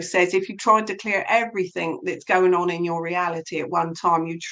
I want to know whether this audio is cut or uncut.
uncut